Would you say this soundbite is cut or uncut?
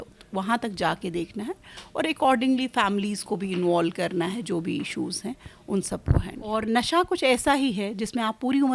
cut